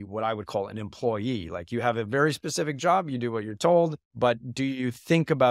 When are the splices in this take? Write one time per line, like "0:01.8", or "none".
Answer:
0:04.0